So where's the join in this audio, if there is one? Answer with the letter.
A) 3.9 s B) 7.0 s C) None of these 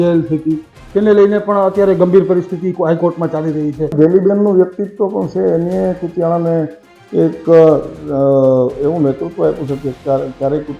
A